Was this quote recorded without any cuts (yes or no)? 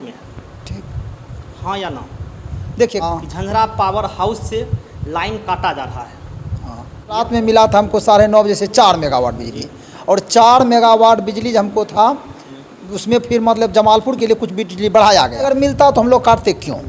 no